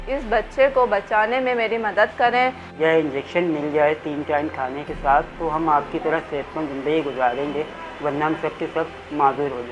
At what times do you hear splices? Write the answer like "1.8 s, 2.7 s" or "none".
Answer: 2.7 s